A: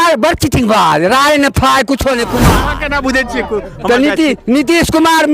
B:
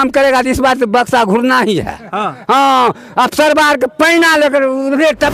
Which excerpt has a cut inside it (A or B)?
A